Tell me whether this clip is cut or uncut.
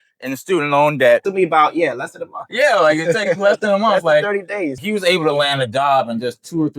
cut